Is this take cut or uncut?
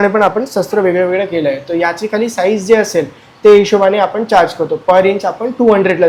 uncut